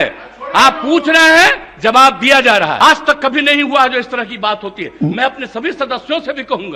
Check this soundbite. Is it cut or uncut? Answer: cut